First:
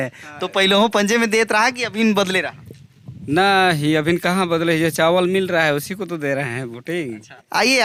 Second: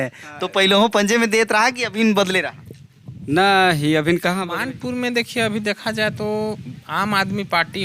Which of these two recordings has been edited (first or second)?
second